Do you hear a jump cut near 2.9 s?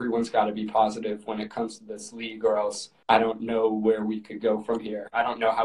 yes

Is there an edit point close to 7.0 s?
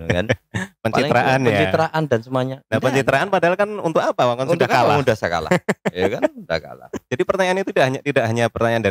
yes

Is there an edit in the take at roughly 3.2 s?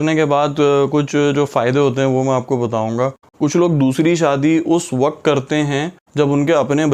yes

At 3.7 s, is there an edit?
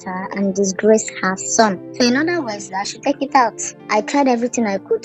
yes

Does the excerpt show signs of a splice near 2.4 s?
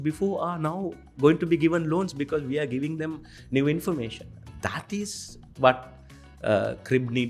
no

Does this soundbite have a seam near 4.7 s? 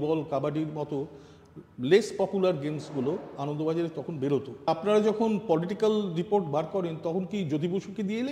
yes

